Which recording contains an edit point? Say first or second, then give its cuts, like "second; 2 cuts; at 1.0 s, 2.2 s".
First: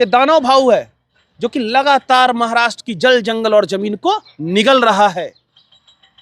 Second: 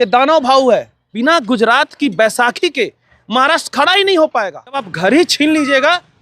second; 2 cuts; at 1.0 s, 4.9 s